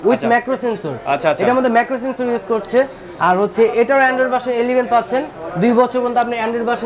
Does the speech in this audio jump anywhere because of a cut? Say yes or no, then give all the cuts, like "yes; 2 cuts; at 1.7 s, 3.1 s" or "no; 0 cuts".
no; 0 cuts